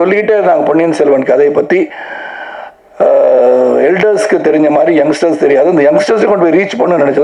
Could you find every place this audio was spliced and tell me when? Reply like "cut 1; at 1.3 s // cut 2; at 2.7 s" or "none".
none

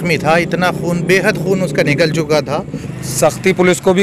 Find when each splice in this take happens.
cut 1; at 2.8 s

